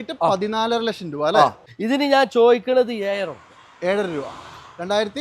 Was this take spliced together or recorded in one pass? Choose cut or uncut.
cut